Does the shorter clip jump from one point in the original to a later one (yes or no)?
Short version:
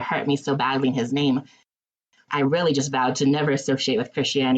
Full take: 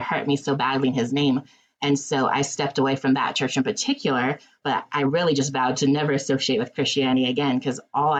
yes